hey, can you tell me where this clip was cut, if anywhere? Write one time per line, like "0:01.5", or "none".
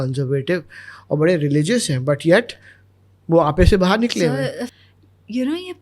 0:04.7